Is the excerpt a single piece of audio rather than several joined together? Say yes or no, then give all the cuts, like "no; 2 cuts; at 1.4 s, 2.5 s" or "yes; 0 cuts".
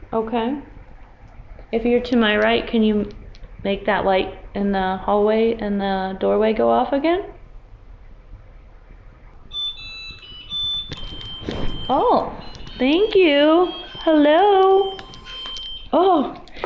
no; 1 cut; at 9.4 s